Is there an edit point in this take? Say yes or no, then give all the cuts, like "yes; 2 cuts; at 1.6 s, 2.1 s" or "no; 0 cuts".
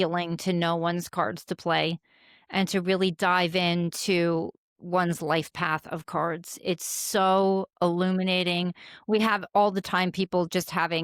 no; 0 cuts